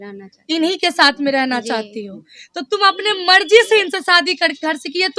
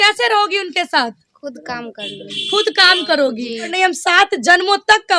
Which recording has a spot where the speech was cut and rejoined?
second; 1 cut; at 3.7 s

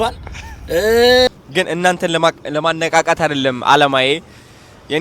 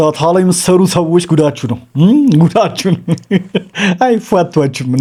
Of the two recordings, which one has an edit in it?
first; 1 cut; at 1.3 s

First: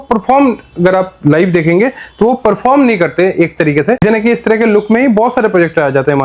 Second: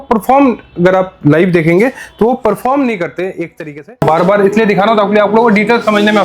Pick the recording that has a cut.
second; 1 cut; at 4.0 s

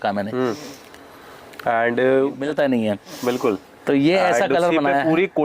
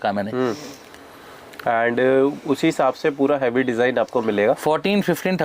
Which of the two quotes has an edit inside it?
first; 1 cut; at 2.4 s

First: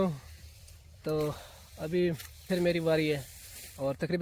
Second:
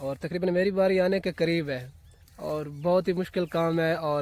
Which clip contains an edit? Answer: first; 1 cut; at 2.5 s

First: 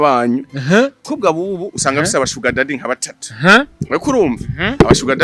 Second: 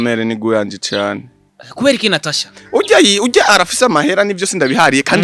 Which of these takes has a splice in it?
first; 1 cut; at 1.1 s

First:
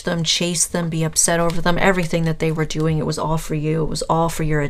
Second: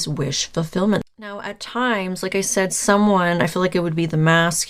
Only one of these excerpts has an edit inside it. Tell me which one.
second; 1 cut; at 1.0 s

